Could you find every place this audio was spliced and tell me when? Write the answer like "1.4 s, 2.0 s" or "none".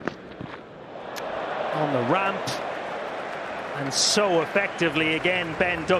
none